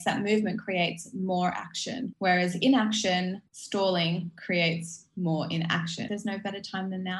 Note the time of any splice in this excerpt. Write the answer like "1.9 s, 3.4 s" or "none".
2.1 s, 3.5 s, 6.0 s